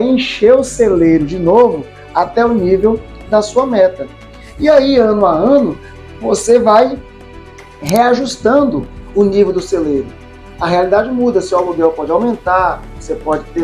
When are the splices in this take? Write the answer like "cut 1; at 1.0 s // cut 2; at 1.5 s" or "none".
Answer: cut 1; at 8.9 s